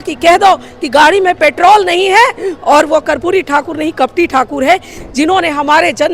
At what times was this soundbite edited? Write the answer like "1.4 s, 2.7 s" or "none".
5.0 s